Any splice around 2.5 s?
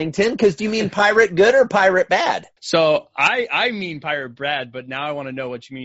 yes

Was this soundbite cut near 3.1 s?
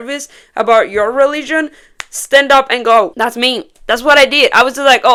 no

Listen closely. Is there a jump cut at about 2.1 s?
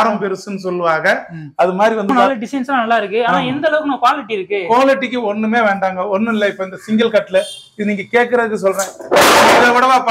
yes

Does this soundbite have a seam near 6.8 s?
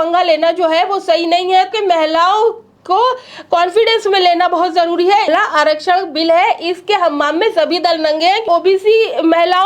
no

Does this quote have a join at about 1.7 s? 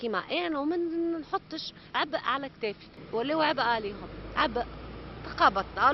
no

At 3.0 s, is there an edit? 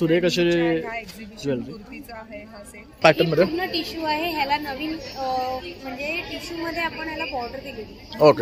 yes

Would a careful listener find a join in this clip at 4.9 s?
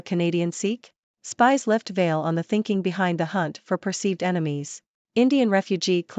yes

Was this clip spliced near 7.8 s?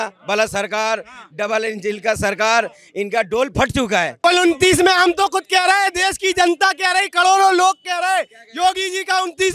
no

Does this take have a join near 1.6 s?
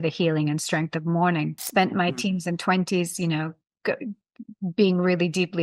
yes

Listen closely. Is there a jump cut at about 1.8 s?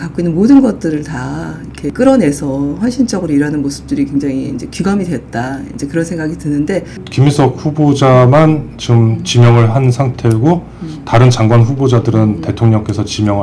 yes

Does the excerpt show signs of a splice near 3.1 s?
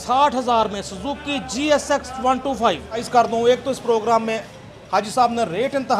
yes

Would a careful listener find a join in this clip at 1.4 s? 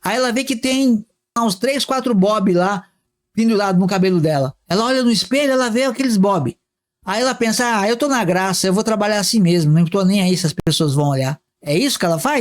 yes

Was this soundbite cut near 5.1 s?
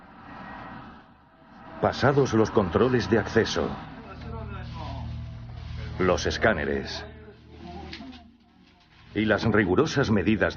no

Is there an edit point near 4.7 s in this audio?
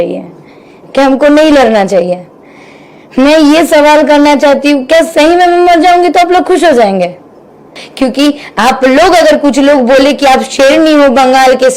no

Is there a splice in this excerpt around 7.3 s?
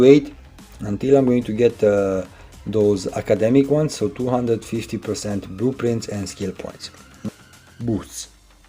yes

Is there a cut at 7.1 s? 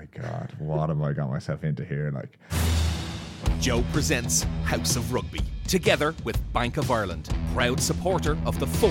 no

